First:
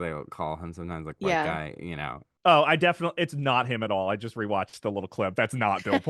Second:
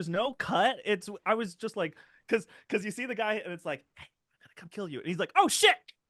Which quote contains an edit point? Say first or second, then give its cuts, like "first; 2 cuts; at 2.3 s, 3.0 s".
first; 1 cut; at 2.4 s